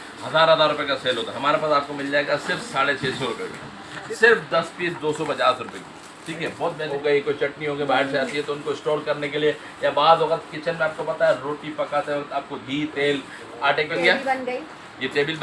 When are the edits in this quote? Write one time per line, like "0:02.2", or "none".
0:04.0
0:06.9
0:14.0